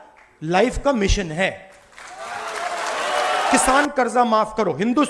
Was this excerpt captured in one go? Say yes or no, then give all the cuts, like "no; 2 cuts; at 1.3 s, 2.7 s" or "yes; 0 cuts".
no; 1 cut; at 3.6 s